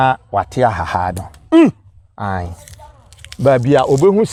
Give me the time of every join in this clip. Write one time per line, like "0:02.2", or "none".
none